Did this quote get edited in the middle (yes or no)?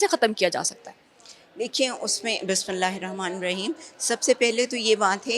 no